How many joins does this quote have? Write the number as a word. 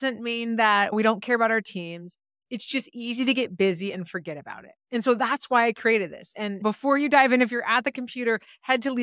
two